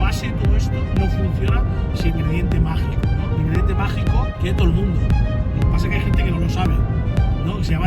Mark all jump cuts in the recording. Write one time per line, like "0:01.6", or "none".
0:02.1
0:04.3